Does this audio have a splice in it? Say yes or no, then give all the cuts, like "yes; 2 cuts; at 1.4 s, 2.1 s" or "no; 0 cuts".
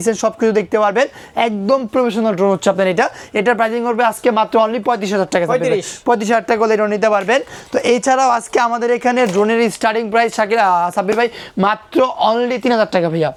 no; 0 cuts